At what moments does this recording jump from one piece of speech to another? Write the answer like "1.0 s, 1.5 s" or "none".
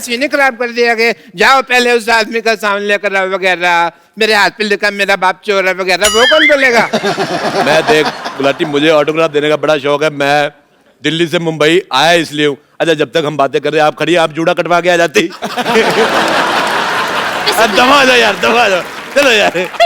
none